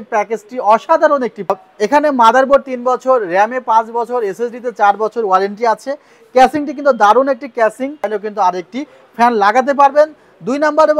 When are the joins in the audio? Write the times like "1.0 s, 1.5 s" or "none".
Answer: 1.5 s, 8.2 s

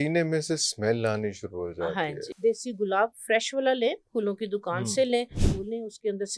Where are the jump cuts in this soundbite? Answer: 2.3 s, 5.5 s

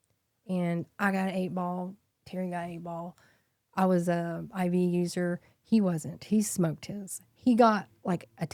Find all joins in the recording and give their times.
none

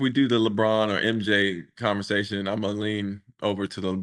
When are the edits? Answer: none

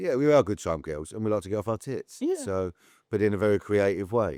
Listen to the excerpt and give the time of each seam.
none

